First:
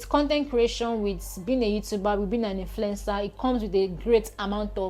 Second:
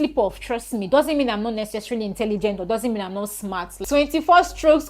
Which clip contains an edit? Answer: second; 1 cut; at 3.7 s

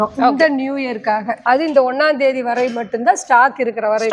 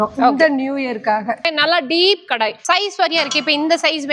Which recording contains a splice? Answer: second; 2 cuts; at 1.3 s, 2.6 s

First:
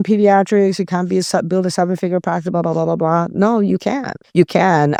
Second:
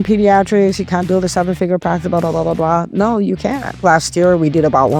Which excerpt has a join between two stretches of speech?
second; 2 cuts; at 1.1 s, 3.8 s

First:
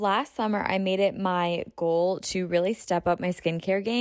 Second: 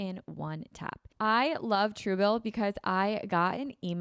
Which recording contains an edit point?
second; 1 cut; at 1.1 s

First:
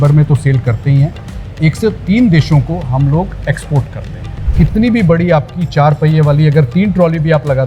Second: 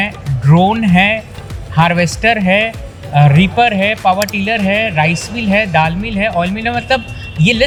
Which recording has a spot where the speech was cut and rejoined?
first; 1 cut; at 4.5 s

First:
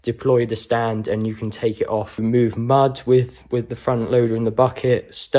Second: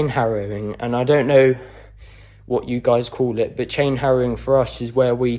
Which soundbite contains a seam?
first; 1 cut; at 2.2 s

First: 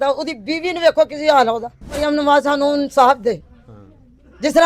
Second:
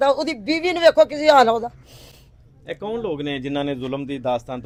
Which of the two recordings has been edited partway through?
first; 1 cut; at 2.0 s

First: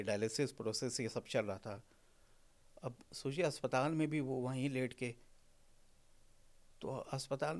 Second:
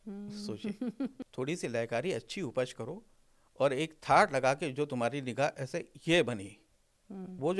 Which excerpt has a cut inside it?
second; 1 cut; at 1.2 s

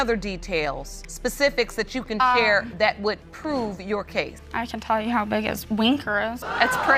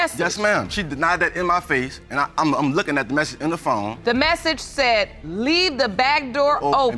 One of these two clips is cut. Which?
second; 1 cut; at 3.9 s

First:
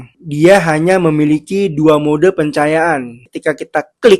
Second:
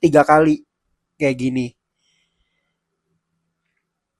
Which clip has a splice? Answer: first; 1 cut; at 3.2 s

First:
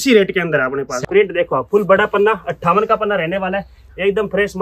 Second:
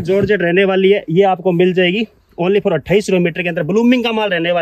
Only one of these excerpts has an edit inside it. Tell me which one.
first; 1 cut; at 0.9 s

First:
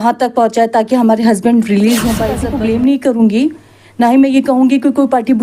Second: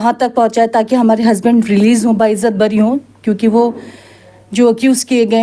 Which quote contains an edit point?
first; 1 cut; at 2.4 s

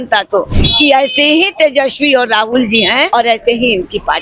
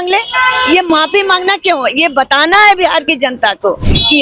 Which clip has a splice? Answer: first; 1 cut; at 3.1 s

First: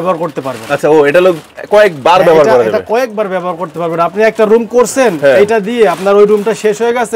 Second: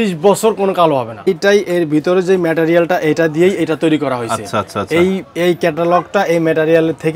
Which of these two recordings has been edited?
second; 1 cut; at 1.3 s

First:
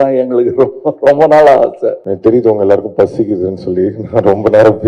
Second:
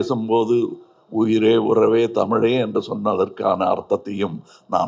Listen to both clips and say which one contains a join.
first; 1 cut; at 2.0 s

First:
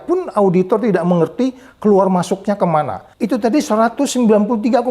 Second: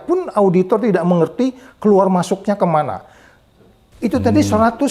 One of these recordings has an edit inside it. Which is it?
first; 1 cut; at 3.0 s

